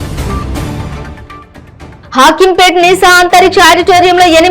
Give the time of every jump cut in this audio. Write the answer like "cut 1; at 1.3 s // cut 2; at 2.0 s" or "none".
cut 1; at 1.0 s